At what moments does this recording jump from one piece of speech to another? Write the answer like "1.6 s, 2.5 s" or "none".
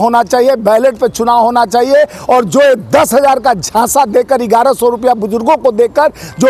none